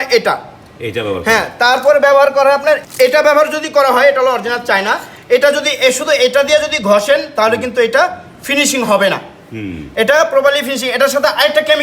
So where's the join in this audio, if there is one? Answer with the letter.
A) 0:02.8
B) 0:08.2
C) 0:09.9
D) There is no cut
A